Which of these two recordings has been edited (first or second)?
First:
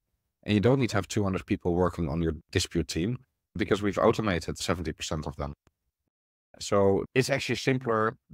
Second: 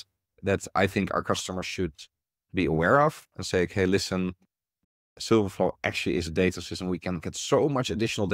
first